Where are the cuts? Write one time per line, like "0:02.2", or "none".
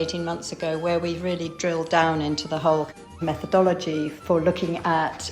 0:03.1